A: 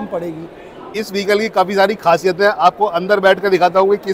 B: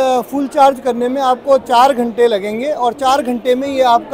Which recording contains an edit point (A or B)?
A